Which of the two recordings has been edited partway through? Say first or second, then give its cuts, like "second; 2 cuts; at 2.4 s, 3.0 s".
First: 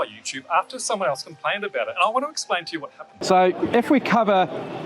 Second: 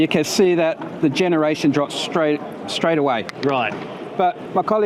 first; 1 cut; at 3.2 s